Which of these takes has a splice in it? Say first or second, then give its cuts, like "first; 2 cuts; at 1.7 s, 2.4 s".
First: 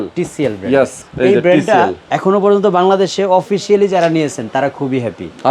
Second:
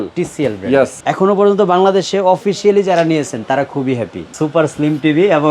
second; 2 cuts; at 1.0 s, 4.3 s